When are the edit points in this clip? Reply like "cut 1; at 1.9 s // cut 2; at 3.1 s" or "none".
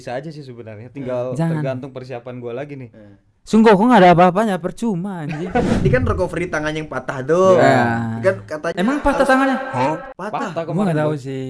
cut 1; at 5.8 s